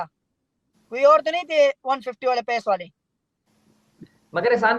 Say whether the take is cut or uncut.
uncut